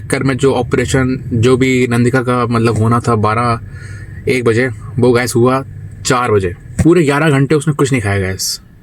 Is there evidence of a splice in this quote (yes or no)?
yes